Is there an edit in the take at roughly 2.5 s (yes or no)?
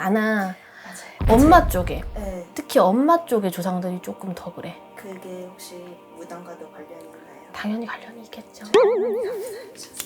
no